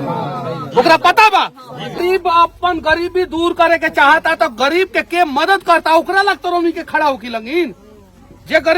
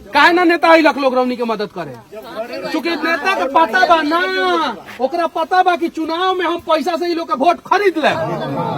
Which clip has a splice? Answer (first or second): first